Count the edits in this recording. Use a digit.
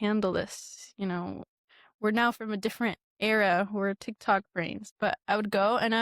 1